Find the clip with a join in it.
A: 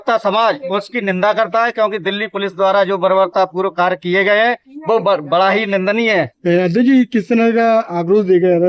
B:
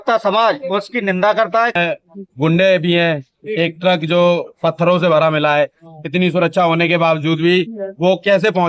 B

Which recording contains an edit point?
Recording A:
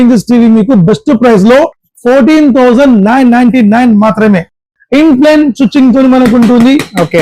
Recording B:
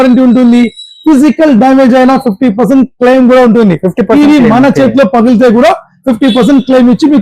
A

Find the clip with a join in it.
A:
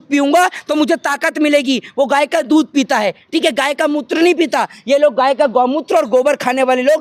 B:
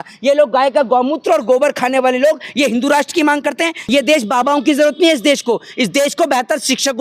B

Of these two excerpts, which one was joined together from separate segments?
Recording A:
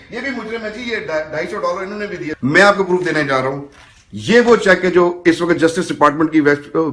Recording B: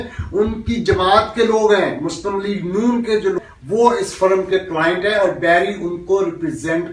A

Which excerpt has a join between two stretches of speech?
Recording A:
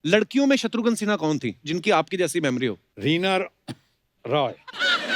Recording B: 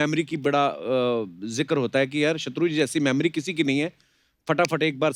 A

